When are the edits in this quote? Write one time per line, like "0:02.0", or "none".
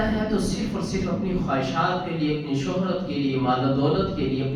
none

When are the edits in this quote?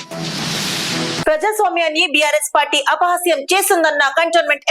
0:01.0

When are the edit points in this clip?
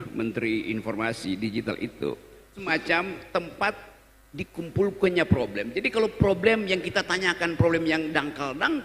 0:02.6

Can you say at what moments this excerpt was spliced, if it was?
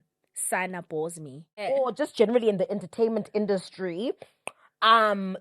0:01.6

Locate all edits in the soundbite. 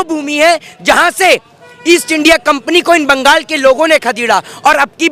none

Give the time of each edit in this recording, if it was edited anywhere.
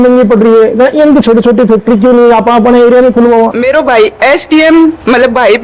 0:03.6

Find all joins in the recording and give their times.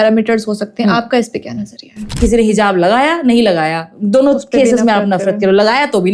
0:02.1

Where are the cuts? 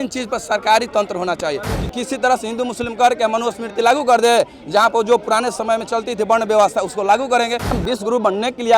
0:01.7
0:07.8

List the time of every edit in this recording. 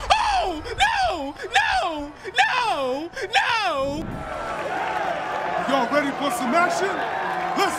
0:04.3

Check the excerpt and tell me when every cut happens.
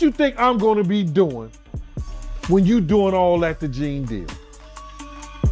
none

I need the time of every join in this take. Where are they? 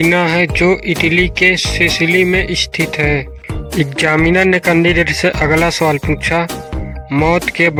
none

